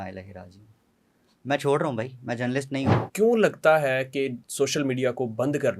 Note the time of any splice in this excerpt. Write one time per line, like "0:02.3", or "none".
0:03.0
0:04.4